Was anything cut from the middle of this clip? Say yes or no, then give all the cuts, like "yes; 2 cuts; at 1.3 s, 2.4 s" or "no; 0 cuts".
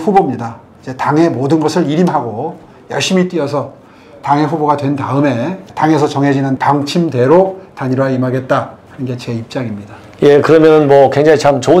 no; 0 cuts